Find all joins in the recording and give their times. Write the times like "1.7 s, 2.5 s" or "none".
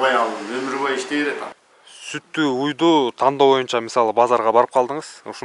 1.6 s